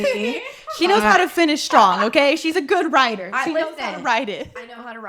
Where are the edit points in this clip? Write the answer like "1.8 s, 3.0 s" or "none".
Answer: none